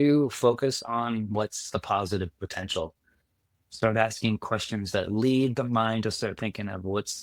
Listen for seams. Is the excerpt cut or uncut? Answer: uncut